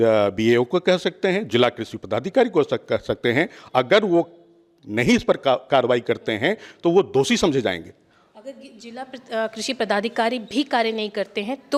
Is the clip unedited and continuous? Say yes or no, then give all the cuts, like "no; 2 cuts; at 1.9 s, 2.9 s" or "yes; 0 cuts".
yes; 0 cuts